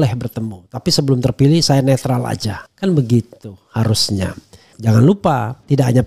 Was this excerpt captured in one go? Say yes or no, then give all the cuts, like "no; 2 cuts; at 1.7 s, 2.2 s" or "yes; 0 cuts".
no; 1 cut; at 4.7 s